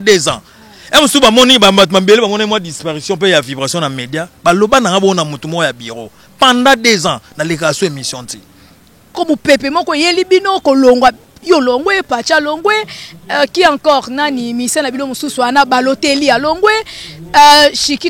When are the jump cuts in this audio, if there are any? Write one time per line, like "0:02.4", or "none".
0:09.2